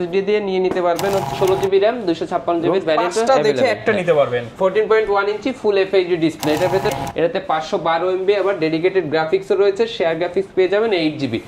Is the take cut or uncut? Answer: cut